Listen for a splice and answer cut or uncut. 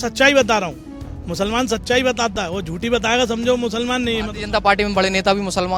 uncut